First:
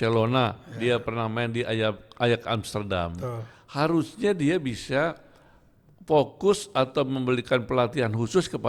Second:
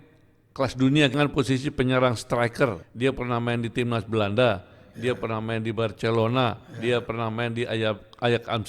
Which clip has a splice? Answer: second; 2 cuts; at 1.1 s, 2.9 s

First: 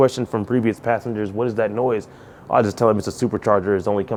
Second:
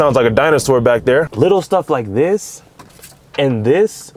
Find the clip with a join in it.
second; 1 cut; at 1.3 s

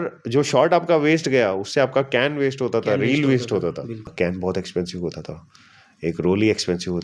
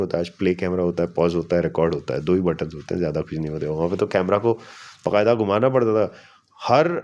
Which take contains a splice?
first; 1 cut; at 4.1 s

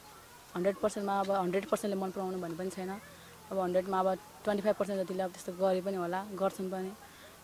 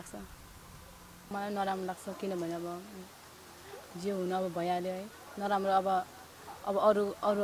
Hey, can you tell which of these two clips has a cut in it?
second; 1 cut; at 1.3 s

